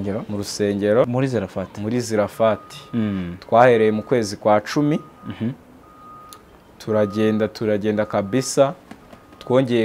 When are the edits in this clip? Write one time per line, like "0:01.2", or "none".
0:01.1